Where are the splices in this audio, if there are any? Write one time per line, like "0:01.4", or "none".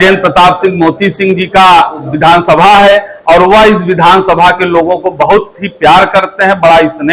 0:02.1